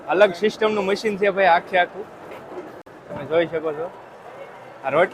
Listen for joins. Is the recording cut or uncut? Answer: uncut